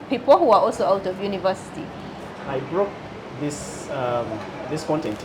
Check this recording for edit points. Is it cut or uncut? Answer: cut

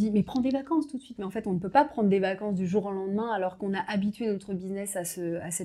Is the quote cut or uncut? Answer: uncut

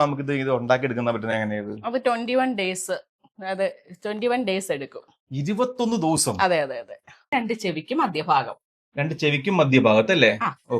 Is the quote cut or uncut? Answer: cut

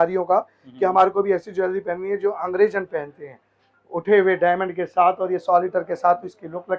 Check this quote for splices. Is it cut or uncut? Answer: uncut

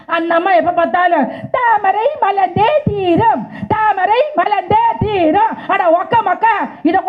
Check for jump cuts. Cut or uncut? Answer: uncut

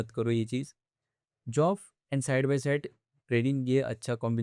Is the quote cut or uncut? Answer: uncut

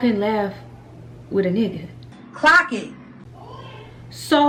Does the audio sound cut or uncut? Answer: uncut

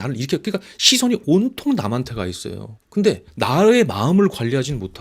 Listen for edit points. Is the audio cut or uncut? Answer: cut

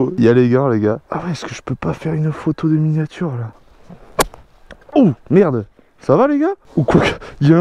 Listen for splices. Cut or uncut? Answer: cut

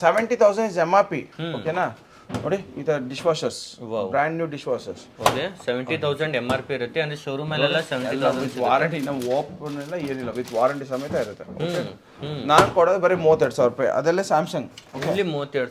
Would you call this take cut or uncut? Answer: uncut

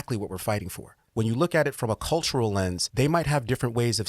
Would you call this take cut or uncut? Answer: cut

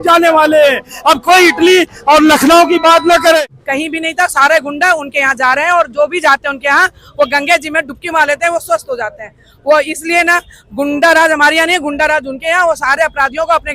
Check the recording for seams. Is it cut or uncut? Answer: cut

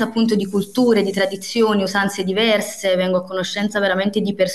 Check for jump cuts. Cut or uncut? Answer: uncut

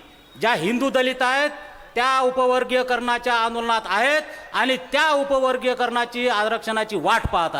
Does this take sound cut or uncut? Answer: uncut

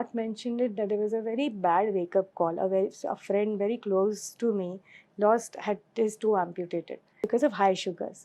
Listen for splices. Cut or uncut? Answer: cut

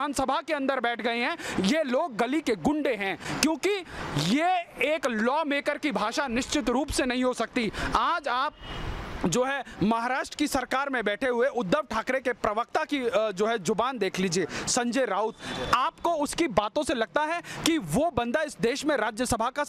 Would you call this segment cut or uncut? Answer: uncut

